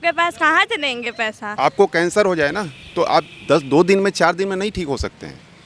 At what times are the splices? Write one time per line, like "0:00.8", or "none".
0:01.4